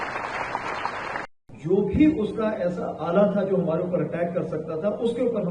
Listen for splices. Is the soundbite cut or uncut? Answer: cut